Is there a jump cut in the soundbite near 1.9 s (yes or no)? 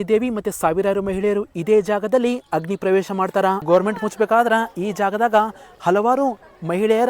no